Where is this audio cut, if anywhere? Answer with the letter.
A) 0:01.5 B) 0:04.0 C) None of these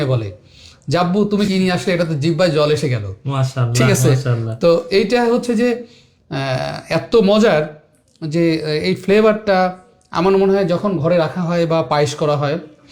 A